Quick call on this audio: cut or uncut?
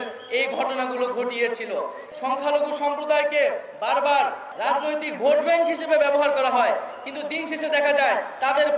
cut